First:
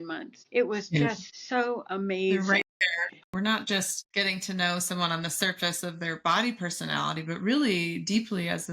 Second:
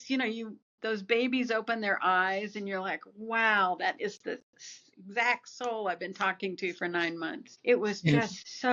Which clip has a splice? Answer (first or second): first